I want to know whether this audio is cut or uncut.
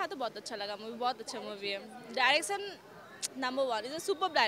uncut